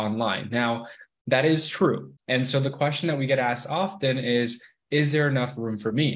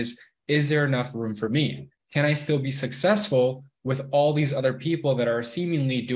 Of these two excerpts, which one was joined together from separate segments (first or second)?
first